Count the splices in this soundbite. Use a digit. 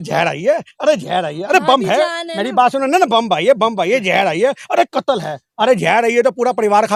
0